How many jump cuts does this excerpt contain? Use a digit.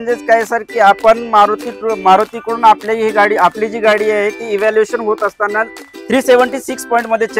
0